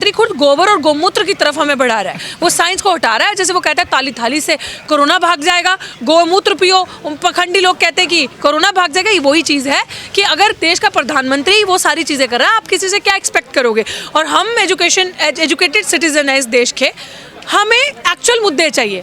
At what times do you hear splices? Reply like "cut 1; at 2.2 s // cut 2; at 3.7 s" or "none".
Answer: none